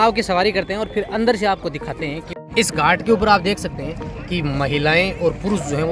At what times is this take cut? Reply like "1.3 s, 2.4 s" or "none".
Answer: 2.3 s